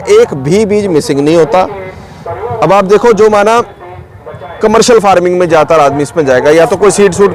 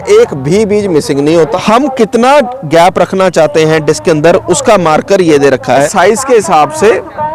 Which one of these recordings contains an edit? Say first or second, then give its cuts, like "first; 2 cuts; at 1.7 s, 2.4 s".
second; 2 cuts; at 1.5 s, 5.9 s